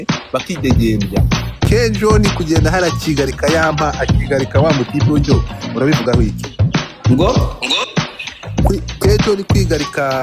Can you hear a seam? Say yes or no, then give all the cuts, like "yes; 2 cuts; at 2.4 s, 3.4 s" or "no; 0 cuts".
yes; 1 cut; at 1.7 s